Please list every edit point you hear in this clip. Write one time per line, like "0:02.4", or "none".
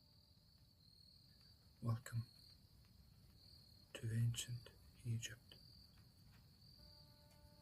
0:01.3